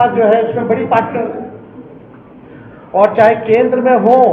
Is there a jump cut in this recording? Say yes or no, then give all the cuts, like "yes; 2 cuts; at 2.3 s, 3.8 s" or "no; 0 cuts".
no; 0 cuts